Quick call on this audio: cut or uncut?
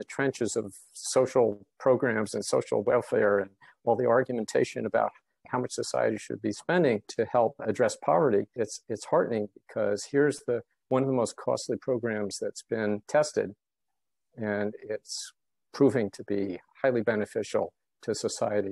cut